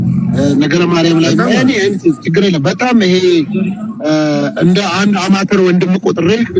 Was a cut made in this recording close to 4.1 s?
no; 0 cuts

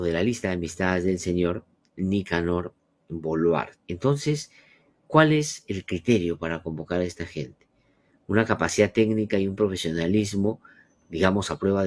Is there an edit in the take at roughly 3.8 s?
yes; 1 cut; at 3.8 s

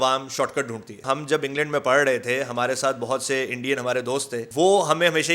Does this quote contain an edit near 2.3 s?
no; 2 cuts; at 1.0 s, 4.4 s

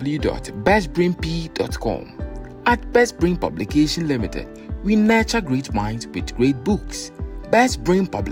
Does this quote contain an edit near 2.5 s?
no; 0 cuts

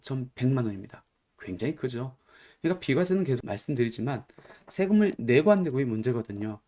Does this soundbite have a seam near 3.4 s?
yes; 1 cut; at 3.4 s

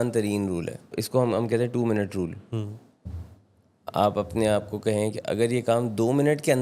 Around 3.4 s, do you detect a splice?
no; 1 cut; at 0.9 s

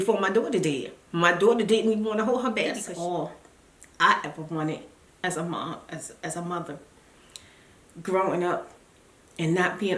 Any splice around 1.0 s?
no; 1 cut; at 2.8 s

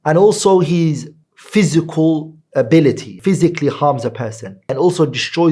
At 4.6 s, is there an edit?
no; 1 cut; at 3.1 s

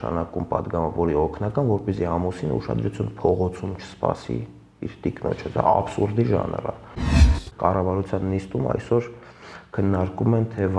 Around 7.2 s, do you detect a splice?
yes; 1 cut; at 7.2 s

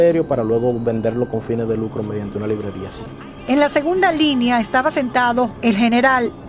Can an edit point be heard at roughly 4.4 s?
no; 1 cut; at 3.1 s

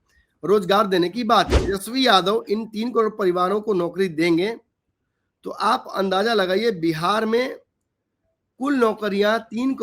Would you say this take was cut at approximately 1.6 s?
yes; 1 cut; at 1.6 s

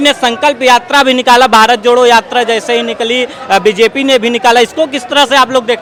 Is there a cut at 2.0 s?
no; 0 cuts

